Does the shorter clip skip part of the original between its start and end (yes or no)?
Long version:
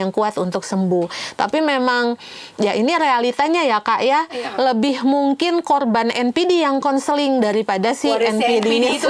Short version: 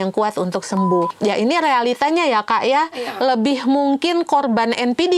yes